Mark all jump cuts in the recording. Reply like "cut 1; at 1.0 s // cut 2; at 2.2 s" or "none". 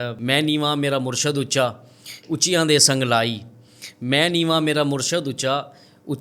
none